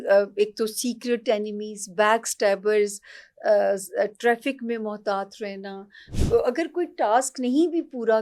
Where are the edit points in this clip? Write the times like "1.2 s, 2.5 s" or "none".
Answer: 6.1 s